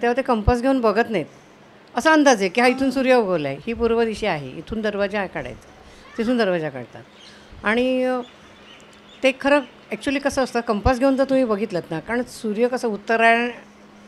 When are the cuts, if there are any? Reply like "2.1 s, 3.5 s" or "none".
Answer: none